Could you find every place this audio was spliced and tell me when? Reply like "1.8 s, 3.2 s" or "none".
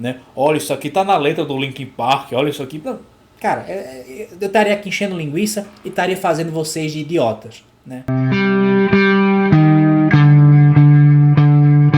8.1 s